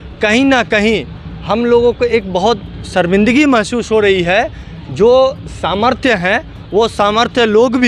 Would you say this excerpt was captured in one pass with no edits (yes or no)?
yes